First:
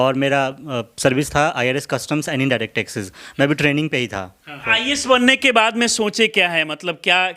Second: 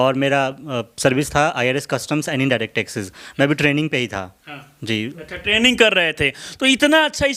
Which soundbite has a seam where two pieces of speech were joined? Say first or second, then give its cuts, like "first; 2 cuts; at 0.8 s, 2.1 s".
first; 1 cut; at 4.7 s